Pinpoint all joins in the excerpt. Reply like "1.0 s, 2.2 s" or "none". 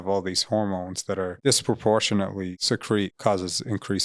1.3 s, 2.9 s

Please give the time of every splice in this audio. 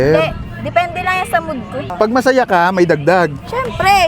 1.8 s

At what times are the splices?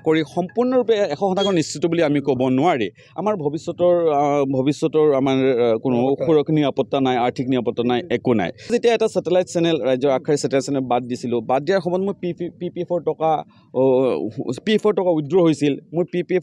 8.7 s

